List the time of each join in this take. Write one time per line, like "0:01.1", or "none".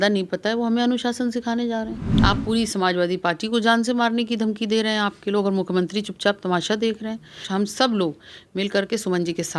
0:02.0
0:07.4